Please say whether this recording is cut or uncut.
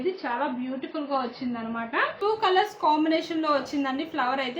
cut